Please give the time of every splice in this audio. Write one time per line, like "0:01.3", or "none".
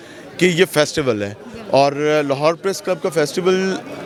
none

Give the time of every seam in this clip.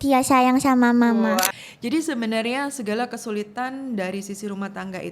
0:01.6

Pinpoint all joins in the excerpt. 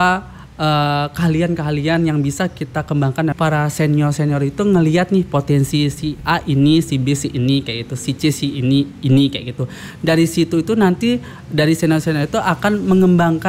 0:03.3

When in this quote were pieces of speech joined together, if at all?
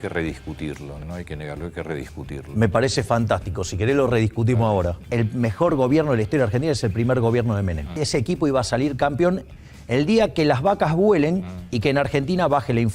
0:01.0
0:05.0
0:08.0

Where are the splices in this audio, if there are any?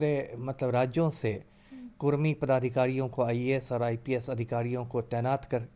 none

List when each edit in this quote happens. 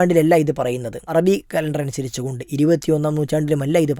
0:01.1

